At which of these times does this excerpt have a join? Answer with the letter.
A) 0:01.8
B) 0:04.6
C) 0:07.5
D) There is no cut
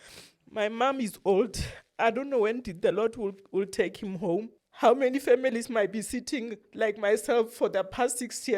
B